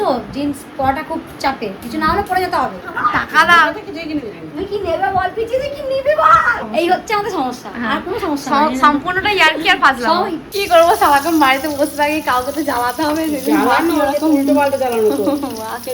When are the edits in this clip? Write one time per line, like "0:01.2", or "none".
0:02.8
0:06.6
0:10.5